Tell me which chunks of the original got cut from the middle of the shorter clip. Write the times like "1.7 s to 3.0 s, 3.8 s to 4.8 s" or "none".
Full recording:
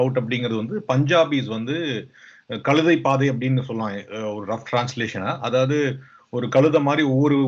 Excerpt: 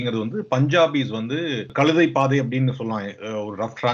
2.0 s to 2.5 s